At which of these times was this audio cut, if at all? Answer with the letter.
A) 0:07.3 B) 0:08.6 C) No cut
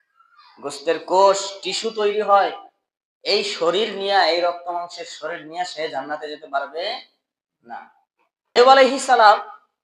B